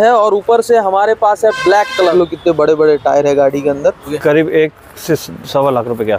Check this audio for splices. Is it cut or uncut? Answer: cut